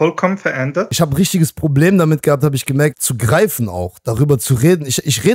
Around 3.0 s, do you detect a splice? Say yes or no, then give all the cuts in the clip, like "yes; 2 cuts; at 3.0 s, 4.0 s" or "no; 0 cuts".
yes; 2 cuts; at 0.9 s, 3.0 s